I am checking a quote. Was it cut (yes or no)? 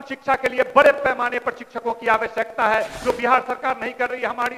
no